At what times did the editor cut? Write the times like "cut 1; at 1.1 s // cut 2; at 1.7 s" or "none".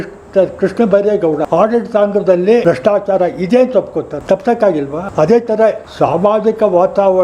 cut 1; at 1.5 s // cut 2; at 2.6 s // cut 3; at 4.2 s // cut 4; at 5.1 s // cut 5; at 5.9 s